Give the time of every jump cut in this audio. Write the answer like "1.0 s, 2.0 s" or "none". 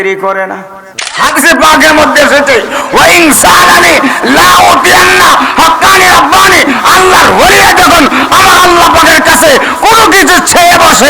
1.0 s